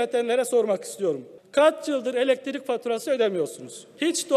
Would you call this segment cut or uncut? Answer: uncut